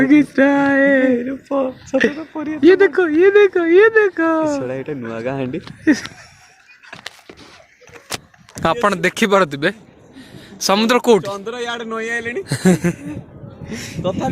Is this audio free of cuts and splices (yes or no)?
no